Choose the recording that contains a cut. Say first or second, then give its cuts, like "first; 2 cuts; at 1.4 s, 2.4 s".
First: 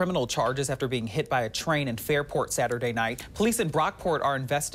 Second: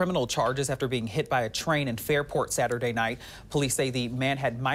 first; 1 cut; at 3.2 s